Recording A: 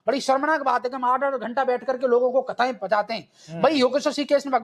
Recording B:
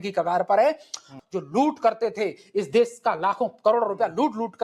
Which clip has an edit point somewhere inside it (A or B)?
B